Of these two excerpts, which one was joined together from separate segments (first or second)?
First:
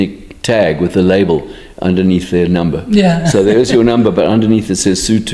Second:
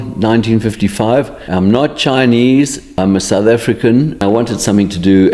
second